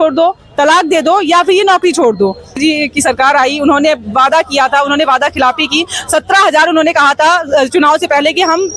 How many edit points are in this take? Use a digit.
1